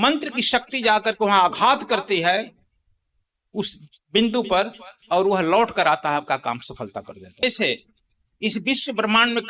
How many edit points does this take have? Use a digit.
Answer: 1